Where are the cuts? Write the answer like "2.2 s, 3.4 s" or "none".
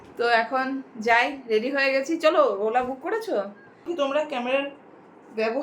3.9 s